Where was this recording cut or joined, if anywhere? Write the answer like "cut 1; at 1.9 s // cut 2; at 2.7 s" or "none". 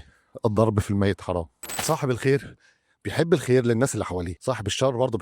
cut 1; at 1.7 s